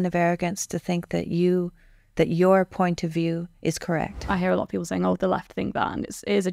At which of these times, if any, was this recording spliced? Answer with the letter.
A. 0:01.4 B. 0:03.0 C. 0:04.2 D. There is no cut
C